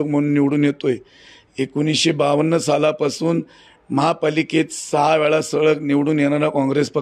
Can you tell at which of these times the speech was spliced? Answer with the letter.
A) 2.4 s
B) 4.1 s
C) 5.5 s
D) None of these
D